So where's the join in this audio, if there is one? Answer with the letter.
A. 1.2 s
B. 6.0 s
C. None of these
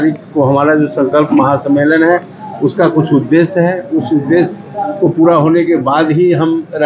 C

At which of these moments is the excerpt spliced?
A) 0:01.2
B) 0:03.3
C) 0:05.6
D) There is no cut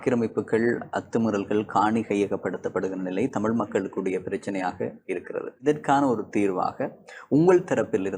C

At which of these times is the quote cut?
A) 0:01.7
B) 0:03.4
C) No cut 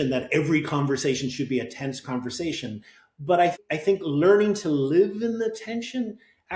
C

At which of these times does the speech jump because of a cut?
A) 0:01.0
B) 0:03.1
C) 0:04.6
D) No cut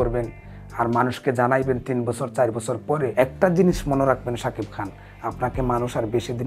B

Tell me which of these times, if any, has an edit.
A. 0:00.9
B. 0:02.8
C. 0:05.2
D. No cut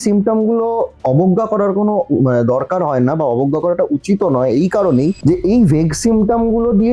D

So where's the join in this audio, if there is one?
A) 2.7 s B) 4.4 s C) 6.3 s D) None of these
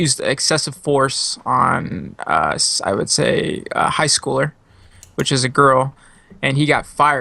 A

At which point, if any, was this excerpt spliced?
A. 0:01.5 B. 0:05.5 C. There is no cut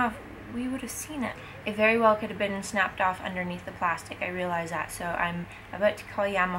A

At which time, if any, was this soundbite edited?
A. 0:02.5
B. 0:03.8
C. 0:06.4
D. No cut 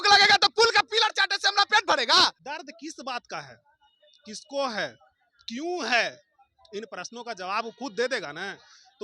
A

